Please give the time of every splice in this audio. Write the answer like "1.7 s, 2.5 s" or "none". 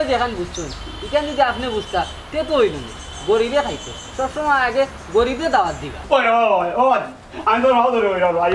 5.9 s